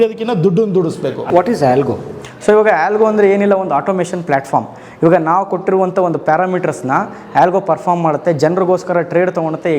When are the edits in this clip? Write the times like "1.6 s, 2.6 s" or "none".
1.2 s

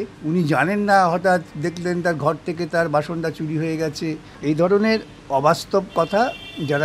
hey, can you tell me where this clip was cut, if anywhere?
4.3 s

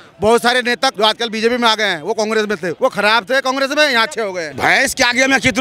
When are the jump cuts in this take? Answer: 0.9 s, 2.7 s, 4.5 s

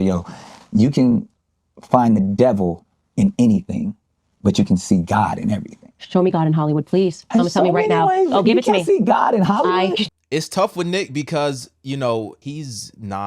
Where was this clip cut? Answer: 10.1 s, 12.4 s

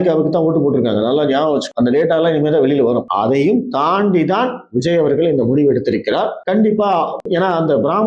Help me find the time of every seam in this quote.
3.1 s, 7.2 s

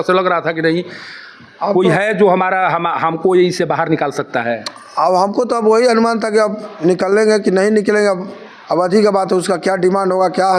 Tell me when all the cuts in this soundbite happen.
none

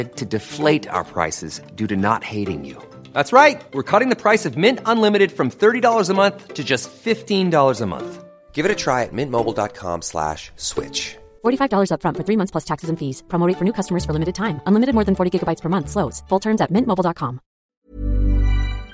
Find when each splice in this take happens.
17.7 s

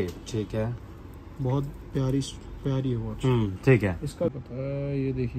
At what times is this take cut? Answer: 4.3 s

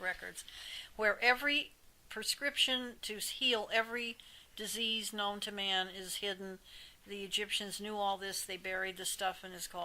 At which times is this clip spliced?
2.5 s

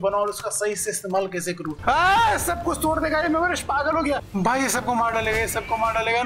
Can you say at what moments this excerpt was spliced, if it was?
1.7 s, 4.3 s

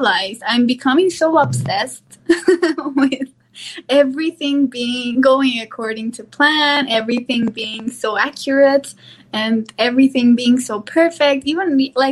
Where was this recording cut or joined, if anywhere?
none

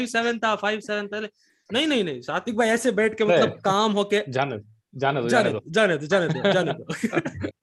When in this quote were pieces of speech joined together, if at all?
none

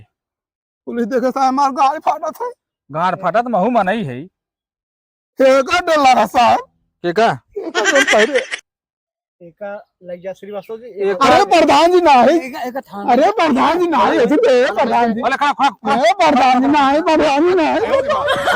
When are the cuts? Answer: none

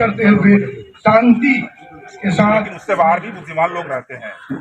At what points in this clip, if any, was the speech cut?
2.8 s

